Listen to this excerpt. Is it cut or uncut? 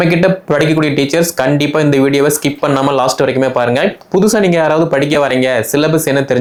uncut